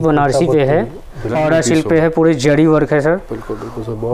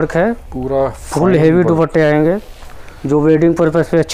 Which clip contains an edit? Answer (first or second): first